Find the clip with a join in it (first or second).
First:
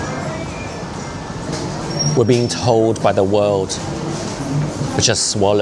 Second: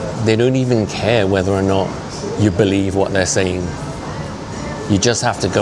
first